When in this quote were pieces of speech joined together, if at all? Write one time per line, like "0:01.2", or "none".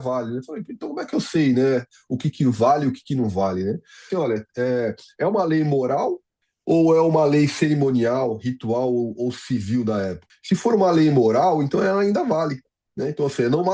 0:04.1
0:10.2